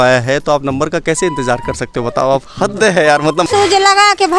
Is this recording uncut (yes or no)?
no